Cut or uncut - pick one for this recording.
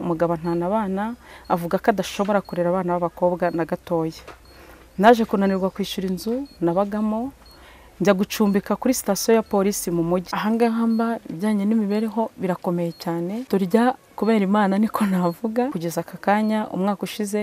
cut